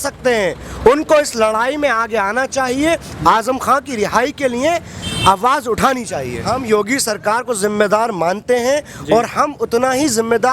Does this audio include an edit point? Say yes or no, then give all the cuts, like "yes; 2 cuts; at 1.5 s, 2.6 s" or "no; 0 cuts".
yes; 1 cut; at 6.4 s